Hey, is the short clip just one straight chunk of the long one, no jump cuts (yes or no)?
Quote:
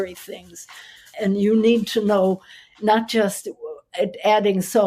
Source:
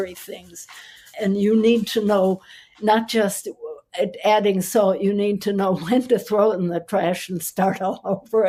yes